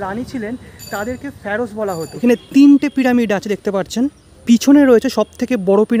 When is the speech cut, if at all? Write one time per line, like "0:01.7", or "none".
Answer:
0:02.1
0:04.3

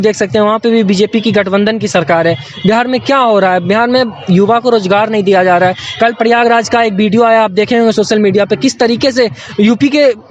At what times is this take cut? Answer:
none

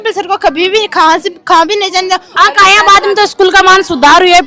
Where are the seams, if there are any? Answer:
0:02.3

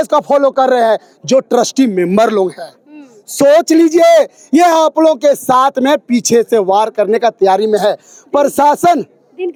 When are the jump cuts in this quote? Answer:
none

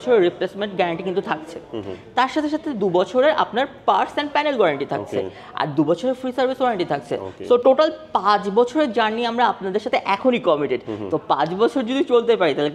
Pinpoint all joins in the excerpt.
none

